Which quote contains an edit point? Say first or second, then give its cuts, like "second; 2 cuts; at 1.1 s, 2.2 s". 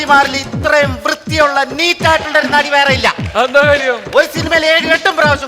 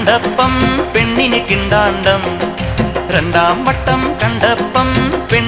first; 1 cut; at 3.2 s